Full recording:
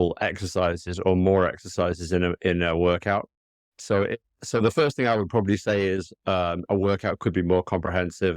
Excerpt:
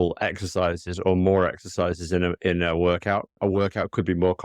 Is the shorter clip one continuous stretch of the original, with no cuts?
no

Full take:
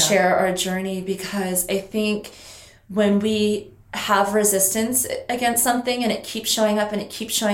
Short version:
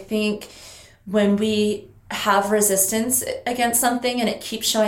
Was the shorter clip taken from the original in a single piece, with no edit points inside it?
yes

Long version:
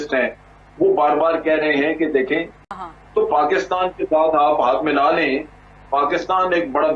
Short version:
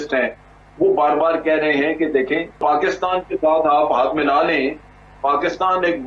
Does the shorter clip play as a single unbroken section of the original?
no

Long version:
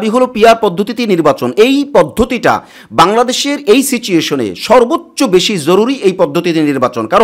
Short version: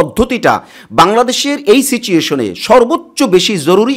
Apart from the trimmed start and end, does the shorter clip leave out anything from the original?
no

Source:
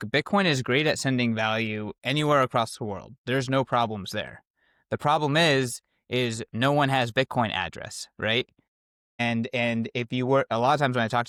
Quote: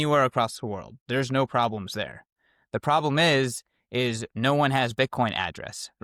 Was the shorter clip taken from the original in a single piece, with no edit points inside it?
yes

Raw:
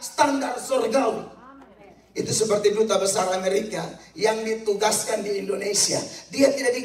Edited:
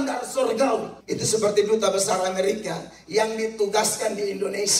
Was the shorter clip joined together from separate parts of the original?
yes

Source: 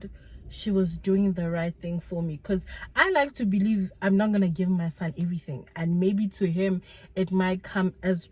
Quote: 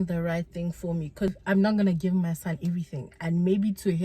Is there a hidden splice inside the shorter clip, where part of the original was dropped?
yes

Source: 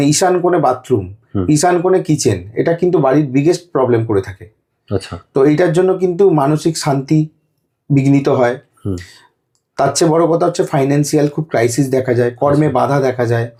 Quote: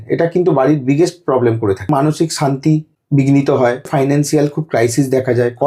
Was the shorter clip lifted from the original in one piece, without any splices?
no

